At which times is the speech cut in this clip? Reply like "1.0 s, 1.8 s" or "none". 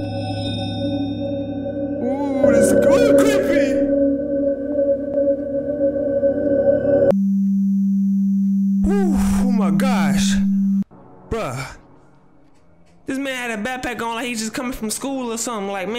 none